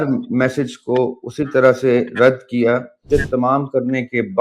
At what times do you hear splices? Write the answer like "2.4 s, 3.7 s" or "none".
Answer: 3.0 s